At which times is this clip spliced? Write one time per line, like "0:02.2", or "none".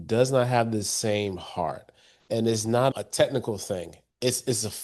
0:02.9